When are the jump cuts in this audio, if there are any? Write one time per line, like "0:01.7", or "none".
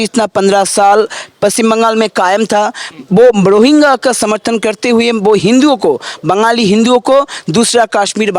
none